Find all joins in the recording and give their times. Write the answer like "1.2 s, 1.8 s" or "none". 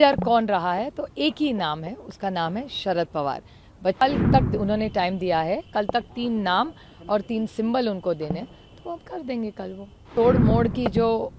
4.0 s, 10.1 s